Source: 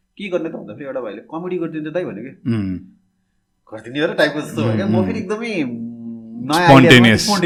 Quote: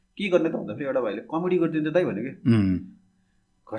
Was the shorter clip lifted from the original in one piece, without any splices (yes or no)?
yes